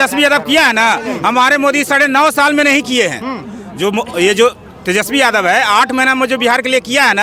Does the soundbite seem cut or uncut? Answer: uncut